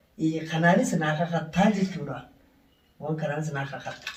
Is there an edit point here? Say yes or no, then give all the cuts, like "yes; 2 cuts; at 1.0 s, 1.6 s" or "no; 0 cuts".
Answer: no; 0 cuts